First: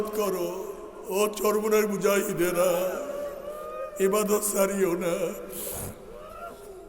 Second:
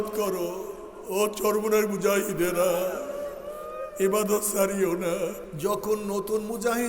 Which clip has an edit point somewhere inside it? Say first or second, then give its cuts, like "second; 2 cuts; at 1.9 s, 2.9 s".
second; 1 cut; at 5.5 s